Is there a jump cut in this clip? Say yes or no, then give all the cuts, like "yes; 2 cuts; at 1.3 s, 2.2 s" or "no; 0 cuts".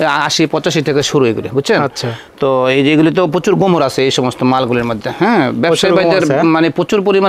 no; 0 cuts